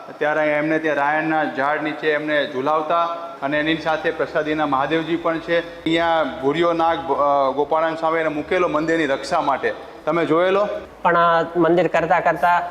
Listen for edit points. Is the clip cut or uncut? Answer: cut